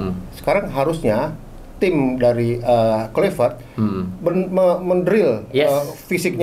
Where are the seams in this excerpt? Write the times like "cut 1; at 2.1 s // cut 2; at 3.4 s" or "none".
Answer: none